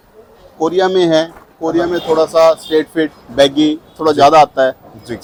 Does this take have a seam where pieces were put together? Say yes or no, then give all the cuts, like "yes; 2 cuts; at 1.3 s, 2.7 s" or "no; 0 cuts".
no; 0 cuts